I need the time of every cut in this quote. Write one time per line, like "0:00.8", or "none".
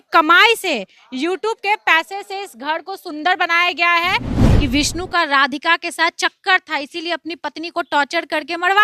0:04.4